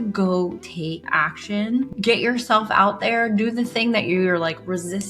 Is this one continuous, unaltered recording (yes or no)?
no